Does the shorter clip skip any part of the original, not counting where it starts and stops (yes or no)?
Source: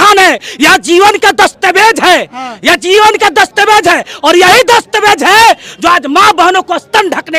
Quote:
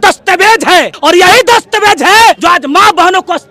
yes